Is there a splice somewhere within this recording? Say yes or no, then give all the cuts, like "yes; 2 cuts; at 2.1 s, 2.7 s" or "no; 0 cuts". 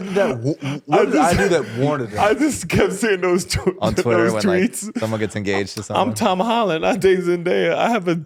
no; 0 cuts